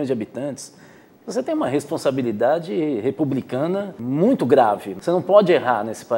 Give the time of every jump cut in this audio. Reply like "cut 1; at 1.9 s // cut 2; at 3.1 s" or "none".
cut 1; at 4.0 s // cut 2; at 4.9 s

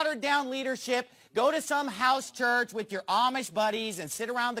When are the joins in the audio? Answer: none

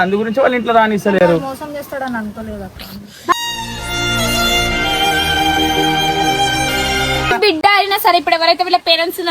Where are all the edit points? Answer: cut 1; at 7.3 s

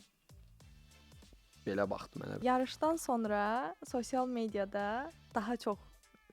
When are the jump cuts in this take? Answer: cut 1; at 2.4 s

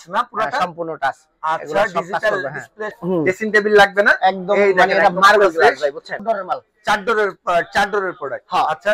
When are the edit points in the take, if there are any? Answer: cut 1; at 3.0 s // cut 2; at 6.1 s

